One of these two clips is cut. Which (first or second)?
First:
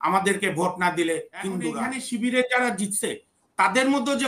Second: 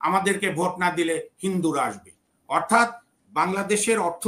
first